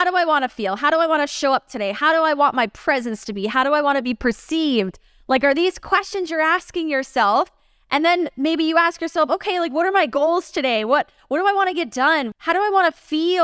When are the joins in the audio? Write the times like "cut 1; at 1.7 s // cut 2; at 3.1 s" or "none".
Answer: cut 1; at 12.3 s